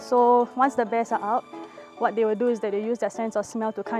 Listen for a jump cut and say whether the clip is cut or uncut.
uncut